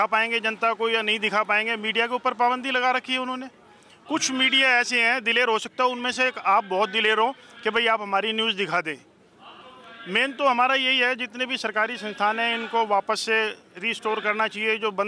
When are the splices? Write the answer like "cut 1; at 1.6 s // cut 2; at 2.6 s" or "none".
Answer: none